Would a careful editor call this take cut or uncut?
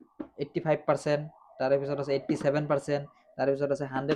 uncut